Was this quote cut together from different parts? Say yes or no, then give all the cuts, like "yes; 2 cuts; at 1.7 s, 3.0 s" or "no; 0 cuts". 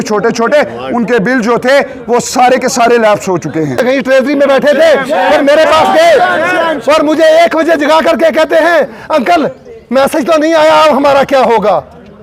yes; 1 cut; at 3.8 s